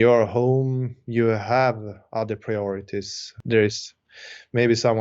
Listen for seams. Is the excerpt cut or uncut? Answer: cut